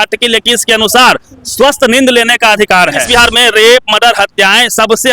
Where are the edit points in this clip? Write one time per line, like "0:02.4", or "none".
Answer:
0:03.0